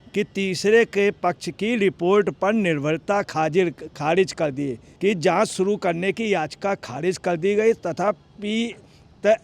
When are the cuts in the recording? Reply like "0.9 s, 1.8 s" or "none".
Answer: 4.9 s